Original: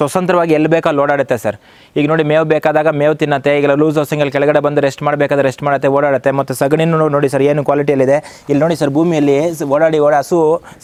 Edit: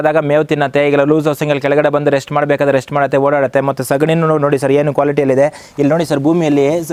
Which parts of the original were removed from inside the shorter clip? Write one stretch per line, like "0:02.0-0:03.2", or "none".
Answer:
none

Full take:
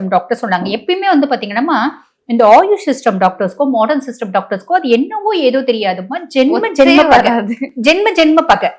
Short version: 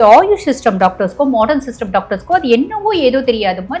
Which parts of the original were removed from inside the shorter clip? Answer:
none

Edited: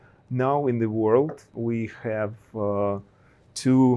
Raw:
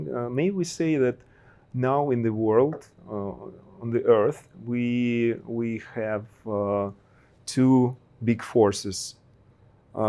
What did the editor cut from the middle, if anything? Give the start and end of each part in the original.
0:03.0-0:05.4

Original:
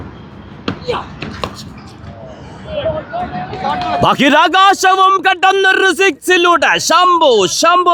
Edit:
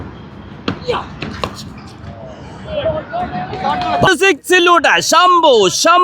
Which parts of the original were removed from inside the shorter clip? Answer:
0:04.1-0:05.8

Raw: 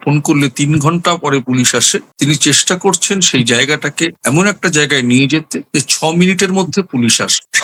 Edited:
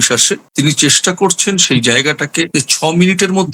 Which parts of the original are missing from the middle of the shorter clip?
0:04.1-0:05.7

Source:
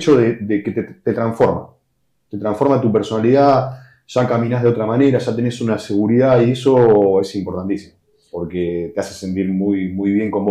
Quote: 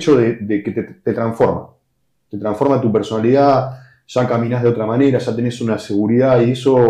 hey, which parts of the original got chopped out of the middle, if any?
none

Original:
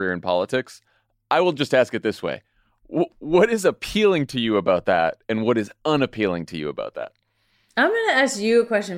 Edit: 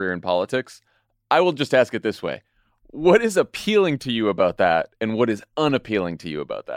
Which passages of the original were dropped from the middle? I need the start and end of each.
0:02.9-0:03.1

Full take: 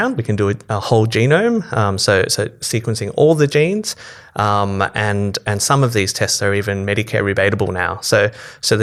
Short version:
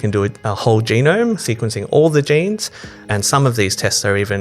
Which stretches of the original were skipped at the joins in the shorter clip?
0:01.7-0:02.7
0:04.3-0:05.4

